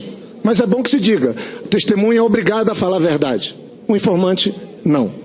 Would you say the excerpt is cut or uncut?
cut